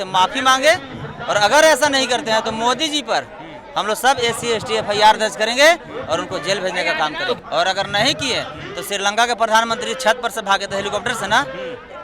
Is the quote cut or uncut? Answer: cut